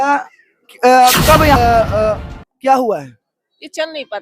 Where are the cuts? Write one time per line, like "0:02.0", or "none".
0:01.6